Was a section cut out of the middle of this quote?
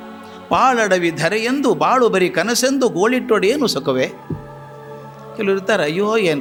no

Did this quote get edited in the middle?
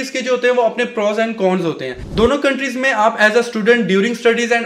yes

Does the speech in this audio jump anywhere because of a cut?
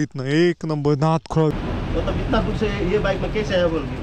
yes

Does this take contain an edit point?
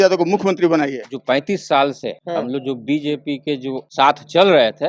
yes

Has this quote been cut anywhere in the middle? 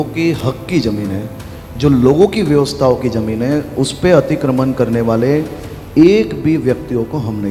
no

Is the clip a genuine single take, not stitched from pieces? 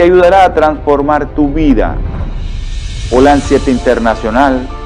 yes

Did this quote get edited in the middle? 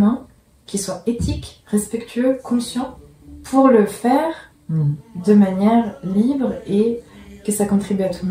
no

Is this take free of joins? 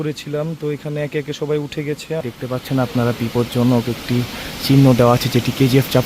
no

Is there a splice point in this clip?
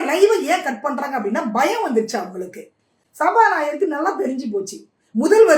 no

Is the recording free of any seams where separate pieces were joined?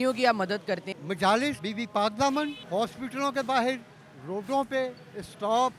no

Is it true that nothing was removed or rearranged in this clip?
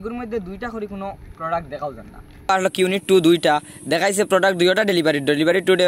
no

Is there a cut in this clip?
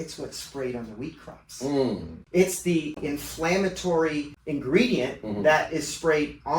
yes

